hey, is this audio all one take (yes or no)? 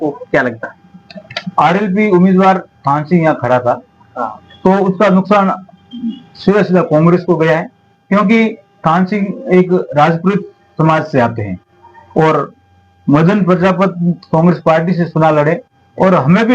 yes